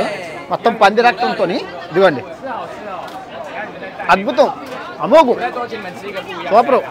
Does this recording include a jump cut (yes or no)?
no